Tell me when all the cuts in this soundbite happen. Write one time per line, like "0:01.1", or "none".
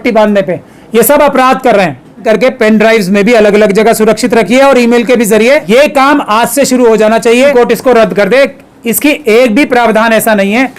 0:02.2
0:05.6
0:07.5